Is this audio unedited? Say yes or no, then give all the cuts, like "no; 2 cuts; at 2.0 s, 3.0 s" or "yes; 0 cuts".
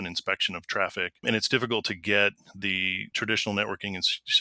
no; 2 cuts; at 1.2 s, 3.1 s